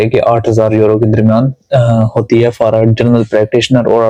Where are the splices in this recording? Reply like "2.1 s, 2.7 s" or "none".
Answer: none